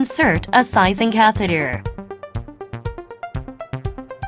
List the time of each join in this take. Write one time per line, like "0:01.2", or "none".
none